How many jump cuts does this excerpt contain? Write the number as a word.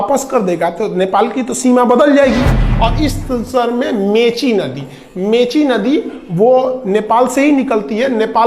one